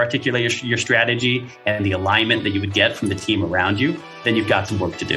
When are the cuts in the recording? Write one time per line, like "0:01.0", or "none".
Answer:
0:04.2